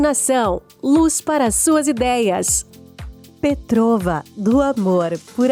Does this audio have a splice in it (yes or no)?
no